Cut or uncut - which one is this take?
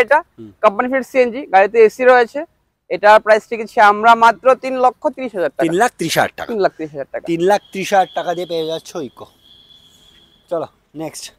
uncut